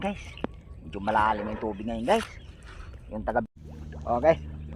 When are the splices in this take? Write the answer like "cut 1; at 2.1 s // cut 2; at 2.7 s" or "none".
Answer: cut 1; at 3.5 s

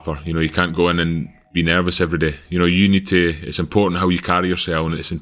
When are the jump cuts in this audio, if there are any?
none

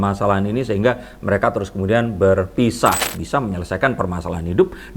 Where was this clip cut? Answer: cut 1; at 3.1 s

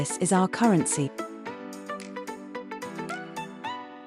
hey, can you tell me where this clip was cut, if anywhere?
cut 1; at 1.1 s

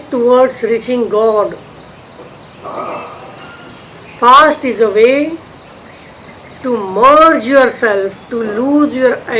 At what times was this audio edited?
none

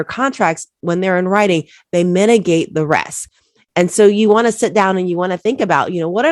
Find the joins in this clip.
none

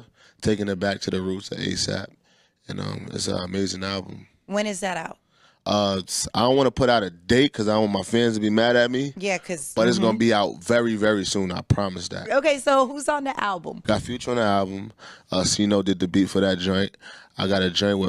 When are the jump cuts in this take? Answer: none

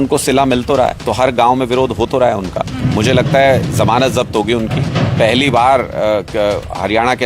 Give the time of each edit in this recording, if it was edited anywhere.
cut 1; at 1.0 s

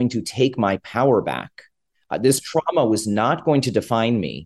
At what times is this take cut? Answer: none

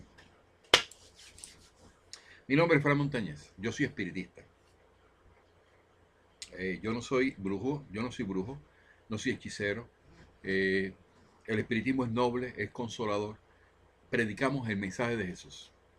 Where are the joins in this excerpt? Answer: cut 1; at 11.7 s

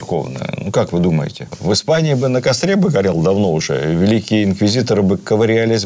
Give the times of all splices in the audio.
none

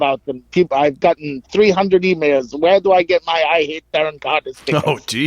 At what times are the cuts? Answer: none

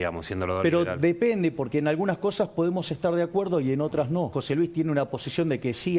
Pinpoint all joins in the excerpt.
cut 1; at 4.4 s

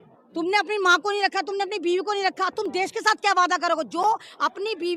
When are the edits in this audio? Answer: none

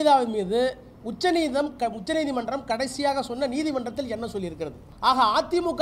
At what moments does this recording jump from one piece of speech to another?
cut 1; at 4.8 s

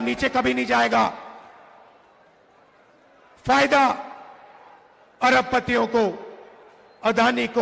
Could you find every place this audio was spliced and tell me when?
none

